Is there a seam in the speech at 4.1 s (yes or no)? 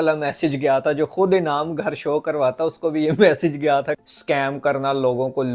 yes